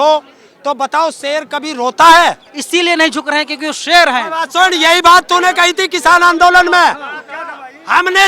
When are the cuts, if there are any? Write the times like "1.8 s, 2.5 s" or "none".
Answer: 2.5 s